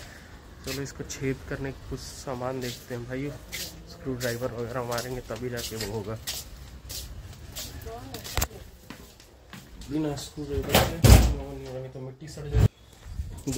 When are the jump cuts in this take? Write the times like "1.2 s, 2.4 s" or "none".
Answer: 12.7 s